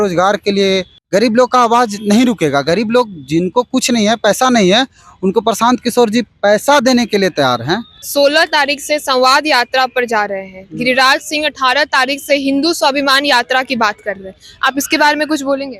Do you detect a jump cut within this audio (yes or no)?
yes